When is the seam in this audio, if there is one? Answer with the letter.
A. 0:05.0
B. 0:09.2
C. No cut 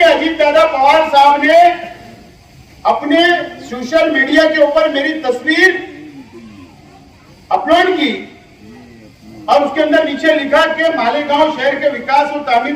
C